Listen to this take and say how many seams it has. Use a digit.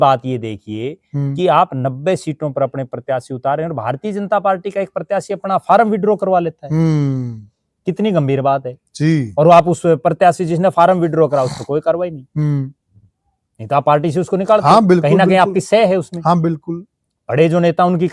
0